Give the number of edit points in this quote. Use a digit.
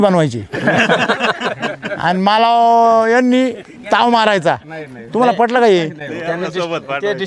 0